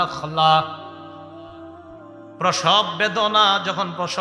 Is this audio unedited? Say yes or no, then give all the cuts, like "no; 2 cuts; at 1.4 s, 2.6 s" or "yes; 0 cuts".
no; 2 cuts; at 0.9 s, 2.4 s